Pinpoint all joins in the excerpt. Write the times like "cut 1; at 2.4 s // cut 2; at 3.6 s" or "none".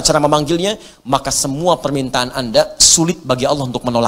none